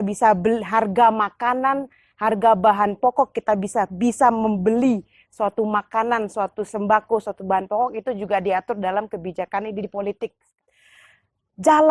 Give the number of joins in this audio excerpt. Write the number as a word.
one